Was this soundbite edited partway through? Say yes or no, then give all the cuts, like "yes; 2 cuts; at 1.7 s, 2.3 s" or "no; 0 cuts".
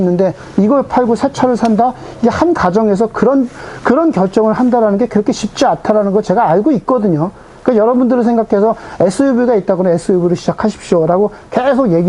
no; 0 cuts